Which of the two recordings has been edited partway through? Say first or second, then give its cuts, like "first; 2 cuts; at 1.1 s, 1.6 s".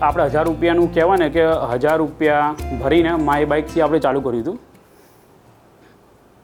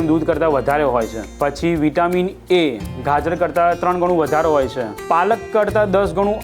second; 1 cut; at 1.2 s